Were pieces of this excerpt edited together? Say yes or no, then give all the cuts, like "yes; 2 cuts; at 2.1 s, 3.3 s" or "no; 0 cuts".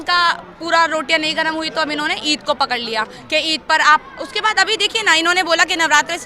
no; 0 cuts